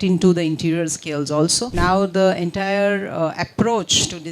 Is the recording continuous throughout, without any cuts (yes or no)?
no